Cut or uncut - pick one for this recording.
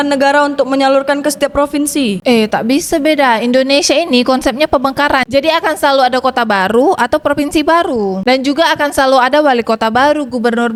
uncut